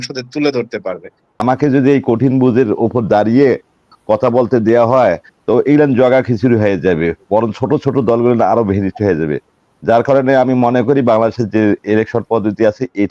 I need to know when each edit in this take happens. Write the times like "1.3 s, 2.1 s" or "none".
1.4 s